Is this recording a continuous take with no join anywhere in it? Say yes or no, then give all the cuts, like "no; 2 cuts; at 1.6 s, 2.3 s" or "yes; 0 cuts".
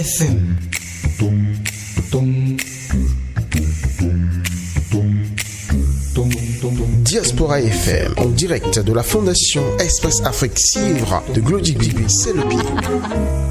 yes; 0 cuts